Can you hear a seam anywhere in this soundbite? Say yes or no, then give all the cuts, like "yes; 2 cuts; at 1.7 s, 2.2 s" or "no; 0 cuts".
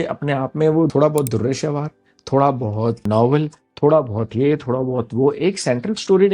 yes; 2 cuts; at 0.9 s, 3.0 s